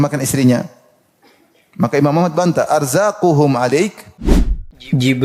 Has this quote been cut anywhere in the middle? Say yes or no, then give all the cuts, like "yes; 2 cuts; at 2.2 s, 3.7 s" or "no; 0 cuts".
yes; 1 cut; at 4.1 s